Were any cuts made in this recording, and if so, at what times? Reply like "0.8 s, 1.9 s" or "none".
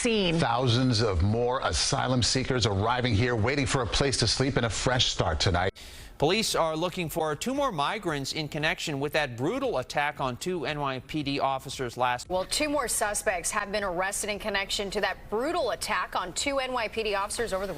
5.7 s, 12.2 s